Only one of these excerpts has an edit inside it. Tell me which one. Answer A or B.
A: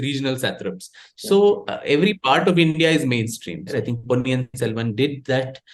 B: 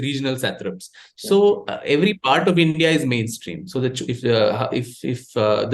A